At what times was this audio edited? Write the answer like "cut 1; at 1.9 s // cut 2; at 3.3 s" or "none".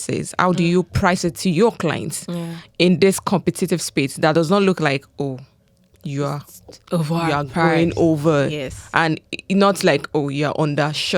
none